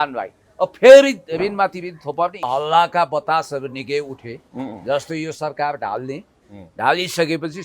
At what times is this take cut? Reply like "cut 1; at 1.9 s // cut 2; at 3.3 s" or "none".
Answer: cut 1; at 2.5 s